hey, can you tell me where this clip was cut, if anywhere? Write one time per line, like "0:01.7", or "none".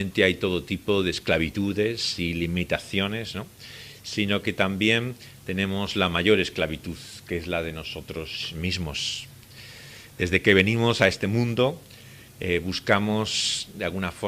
0:04.3